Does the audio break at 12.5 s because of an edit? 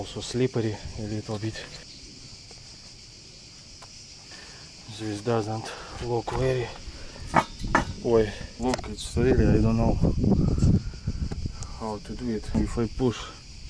yes; 4 cuts; at 1.8 s, 4.3 s, 8.4 s, 12.5 s

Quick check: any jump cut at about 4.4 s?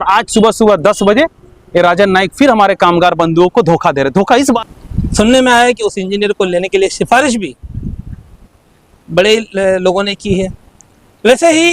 yes; 1 cut; at 4.4 s

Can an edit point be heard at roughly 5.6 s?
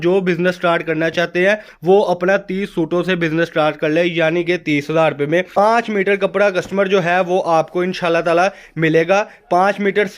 yes; 1 cut; at 5.6 s

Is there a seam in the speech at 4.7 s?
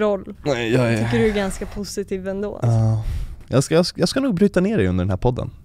no; 0 cuts

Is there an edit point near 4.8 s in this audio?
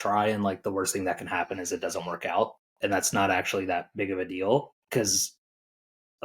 yes; 2 cuts; at 2.6 s, 4.8 s

